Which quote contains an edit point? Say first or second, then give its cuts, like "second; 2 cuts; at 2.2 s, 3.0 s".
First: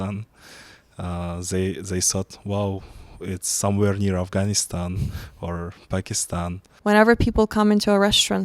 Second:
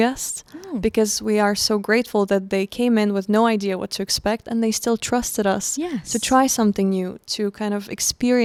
first; 1 cut; at 6.6 s